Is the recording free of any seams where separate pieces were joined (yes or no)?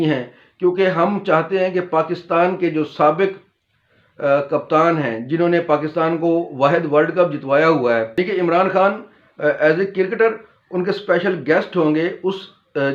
no